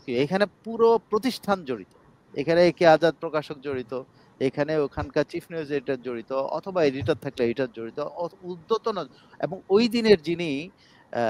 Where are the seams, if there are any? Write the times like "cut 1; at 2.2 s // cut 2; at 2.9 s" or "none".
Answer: none